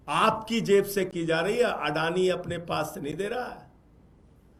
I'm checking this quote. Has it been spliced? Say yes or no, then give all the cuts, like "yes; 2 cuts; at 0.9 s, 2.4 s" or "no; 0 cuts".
no; 0 cuts